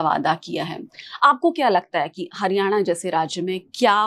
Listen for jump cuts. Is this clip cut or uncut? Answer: uncut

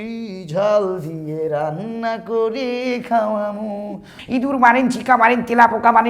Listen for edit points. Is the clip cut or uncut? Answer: cut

